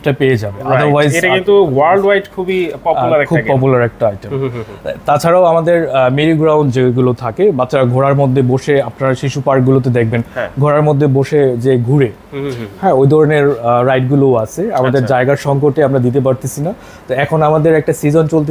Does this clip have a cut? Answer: no; 0 cuts

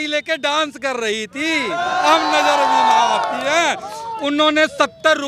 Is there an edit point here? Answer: no; 0 cuts

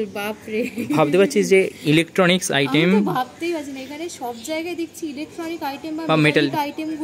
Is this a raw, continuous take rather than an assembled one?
yes; 0 cuts

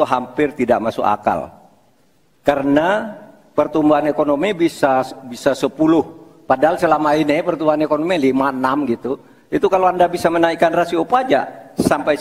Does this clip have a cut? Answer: no; 0 cuts

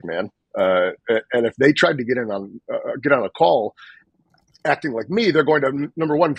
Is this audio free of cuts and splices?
yes; 0 cuts

